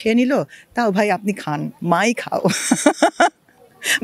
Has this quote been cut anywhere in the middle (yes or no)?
no